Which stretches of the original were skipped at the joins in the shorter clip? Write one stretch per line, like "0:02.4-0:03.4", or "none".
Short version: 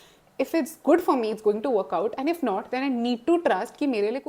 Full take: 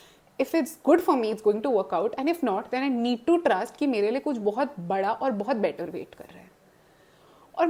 none